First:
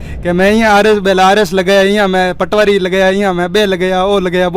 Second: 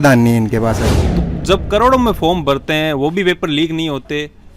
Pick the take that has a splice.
second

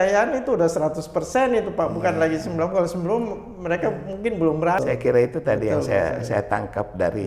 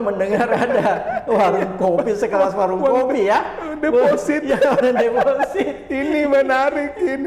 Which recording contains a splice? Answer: first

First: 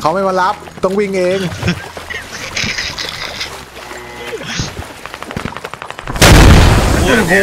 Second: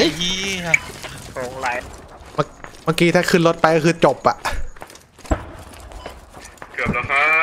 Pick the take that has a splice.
second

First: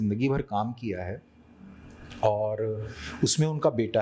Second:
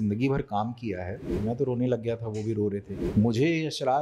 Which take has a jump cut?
second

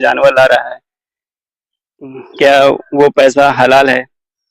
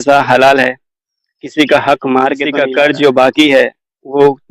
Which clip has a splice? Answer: second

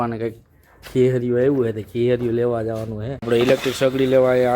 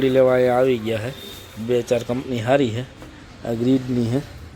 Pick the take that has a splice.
first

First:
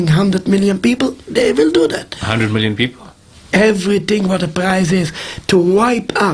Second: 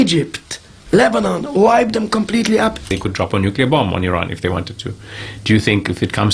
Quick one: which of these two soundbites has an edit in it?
second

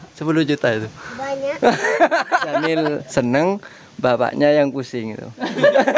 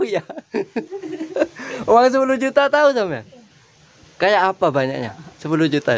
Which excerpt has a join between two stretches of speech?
first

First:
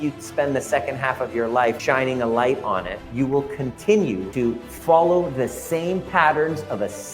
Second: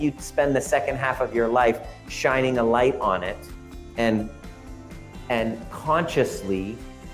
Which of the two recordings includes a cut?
first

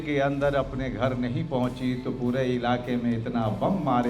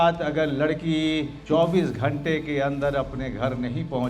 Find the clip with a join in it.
second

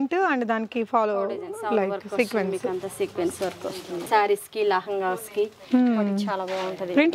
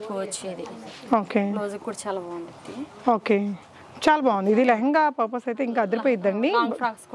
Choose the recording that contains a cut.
first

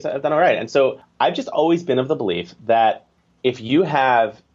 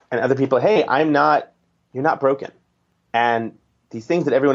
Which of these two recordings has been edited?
first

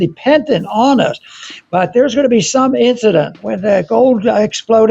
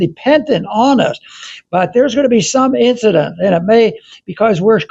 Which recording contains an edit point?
first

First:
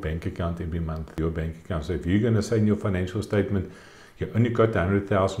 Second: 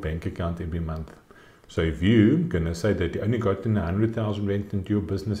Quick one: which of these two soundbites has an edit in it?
first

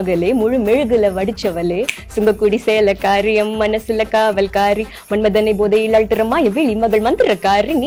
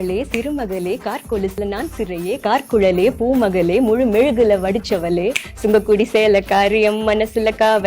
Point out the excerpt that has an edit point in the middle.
second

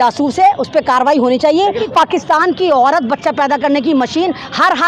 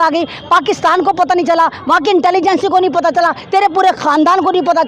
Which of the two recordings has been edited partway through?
first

